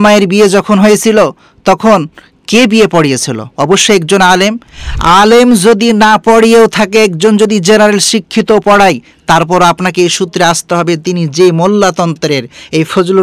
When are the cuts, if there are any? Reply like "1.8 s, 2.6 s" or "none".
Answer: none